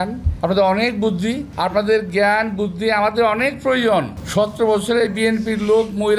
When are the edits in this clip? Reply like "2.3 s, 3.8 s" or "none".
4.2 s

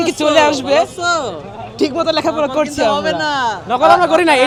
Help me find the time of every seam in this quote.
none

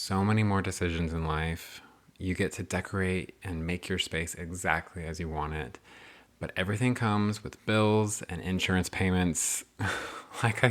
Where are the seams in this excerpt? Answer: none

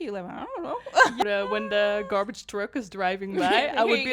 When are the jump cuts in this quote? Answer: 1.2 s

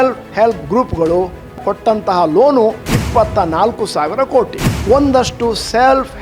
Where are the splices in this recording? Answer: 1.6 s, 2.8 s, 4.7 s

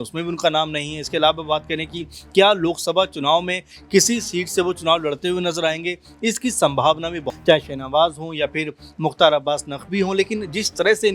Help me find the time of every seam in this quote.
7.3 s

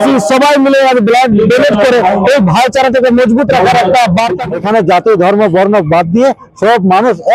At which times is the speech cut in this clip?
4.4 s

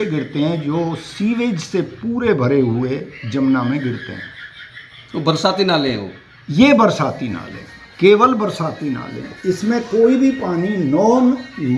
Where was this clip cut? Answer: none

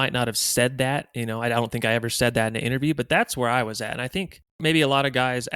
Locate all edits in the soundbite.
4.6 s

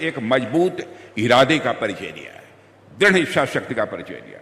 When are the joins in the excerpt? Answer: none

